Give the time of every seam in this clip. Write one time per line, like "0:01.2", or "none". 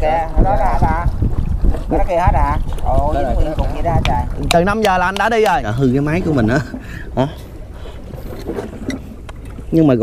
0:05.7

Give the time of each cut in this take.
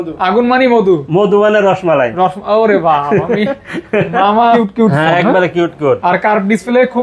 0:04.6

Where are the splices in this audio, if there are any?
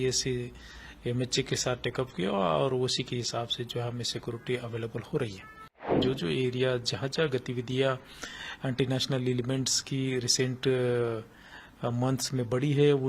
0:06.0

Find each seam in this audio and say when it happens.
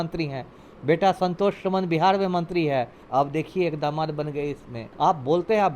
0:03.0
0:04.8

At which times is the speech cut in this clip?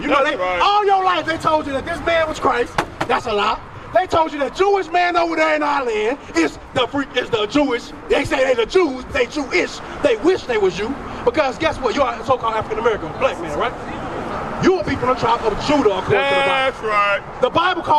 none

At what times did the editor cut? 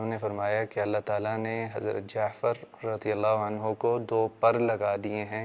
none

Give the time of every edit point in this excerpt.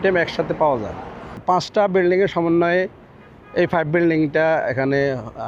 0:01.4

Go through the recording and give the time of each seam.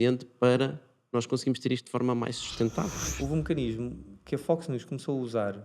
0:02.9

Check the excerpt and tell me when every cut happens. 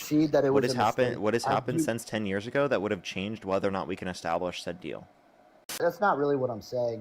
0:05.8

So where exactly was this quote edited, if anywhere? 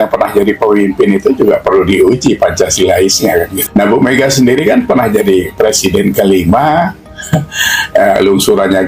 0:03.6

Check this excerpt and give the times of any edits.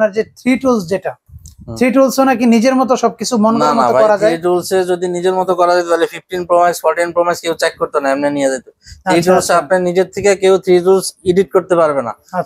none

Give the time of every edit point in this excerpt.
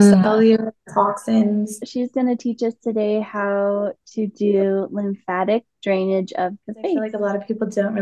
0:01.9
0:07.1

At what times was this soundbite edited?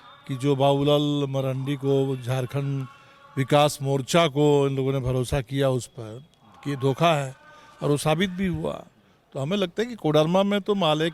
none

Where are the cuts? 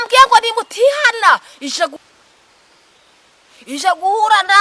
0:02.0

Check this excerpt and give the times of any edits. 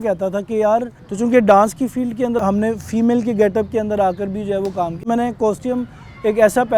0:01.0
0:02.4
0:05.0

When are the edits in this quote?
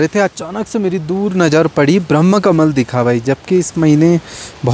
none

